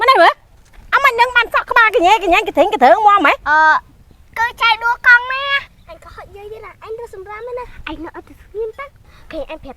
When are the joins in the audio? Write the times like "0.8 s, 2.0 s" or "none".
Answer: 5.7 s